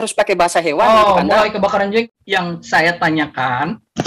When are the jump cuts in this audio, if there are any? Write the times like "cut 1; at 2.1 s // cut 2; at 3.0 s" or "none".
cut 1; at 2.0 s

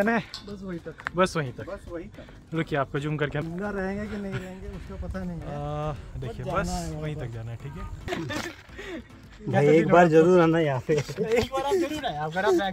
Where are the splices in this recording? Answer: cut 1; at 8.1 s

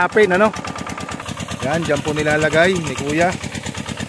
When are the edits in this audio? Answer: cut 1; at 1.2 s

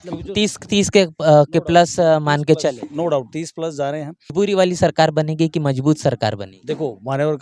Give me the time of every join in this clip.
cut 1; at 4.3 s

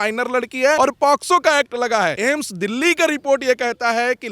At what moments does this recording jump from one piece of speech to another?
cut 1; at 0.8 s // cut 2; at 2.2 s

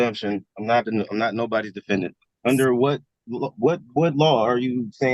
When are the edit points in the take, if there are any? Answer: cut 1; at 2.2 s

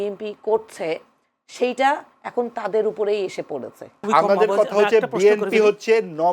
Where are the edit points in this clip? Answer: cut 1; at 3.9 s

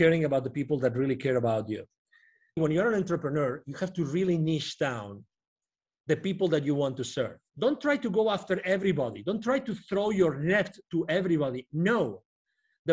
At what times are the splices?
cut 1; at 2.6 s // cut 2; at 7.4 s

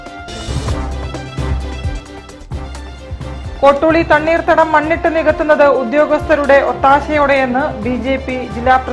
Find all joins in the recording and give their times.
cut 1; at 2.7 s

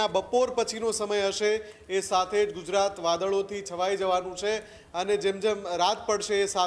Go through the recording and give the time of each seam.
none

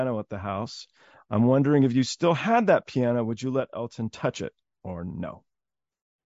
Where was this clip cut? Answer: none

